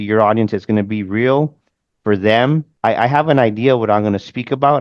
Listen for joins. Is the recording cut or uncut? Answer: cut